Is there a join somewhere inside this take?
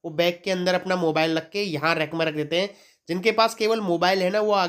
no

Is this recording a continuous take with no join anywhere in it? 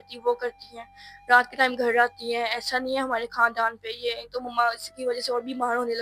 yes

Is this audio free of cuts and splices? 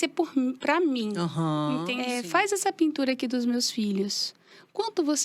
no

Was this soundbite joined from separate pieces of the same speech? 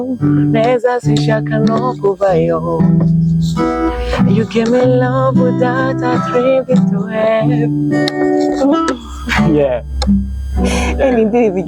no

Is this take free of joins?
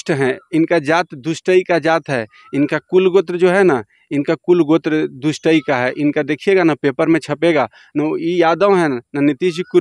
yes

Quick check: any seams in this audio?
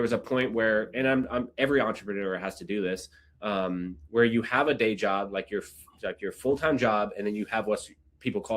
no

